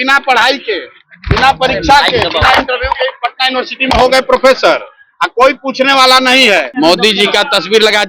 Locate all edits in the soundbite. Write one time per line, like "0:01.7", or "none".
0:06.7